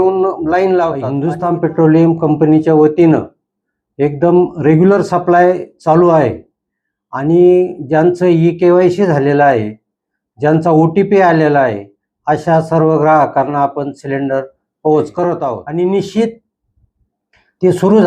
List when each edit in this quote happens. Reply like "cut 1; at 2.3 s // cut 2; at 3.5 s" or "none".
cut 1; at 1.2 s // cut 2; at 15.6 s